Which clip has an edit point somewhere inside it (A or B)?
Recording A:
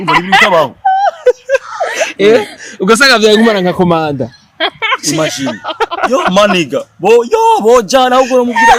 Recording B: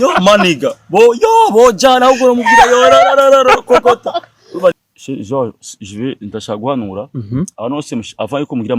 B